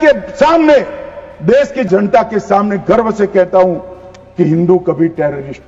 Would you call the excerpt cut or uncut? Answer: cut